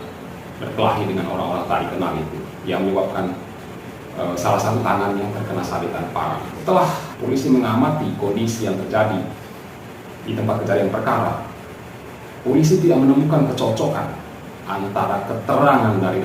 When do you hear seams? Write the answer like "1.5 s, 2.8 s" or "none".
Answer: 6.6 s, 7.1 s

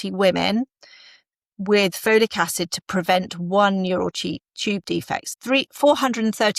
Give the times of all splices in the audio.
5.3 s

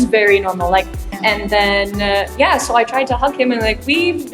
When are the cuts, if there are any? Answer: 1.0 s

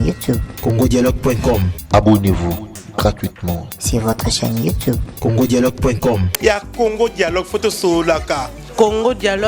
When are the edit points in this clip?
1.7 s, 6.3 s

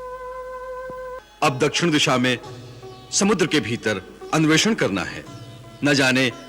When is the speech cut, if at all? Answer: 1.2 s

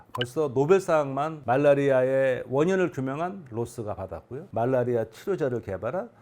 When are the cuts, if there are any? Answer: 4.4 s

